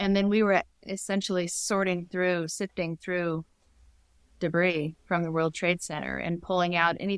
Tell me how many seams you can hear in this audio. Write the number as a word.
zero